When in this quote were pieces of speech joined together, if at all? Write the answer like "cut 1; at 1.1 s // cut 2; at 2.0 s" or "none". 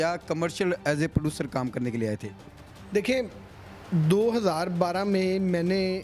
none